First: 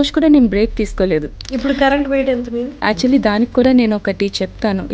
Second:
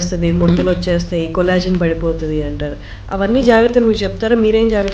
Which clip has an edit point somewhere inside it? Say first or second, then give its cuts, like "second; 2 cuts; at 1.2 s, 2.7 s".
first; 2 cuts; at 1.4 s, 2.7 s